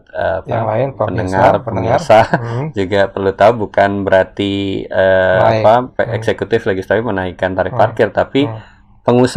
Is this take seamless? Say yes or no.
yes